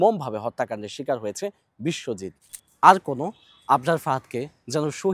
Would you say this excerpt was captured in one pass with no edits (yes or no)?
no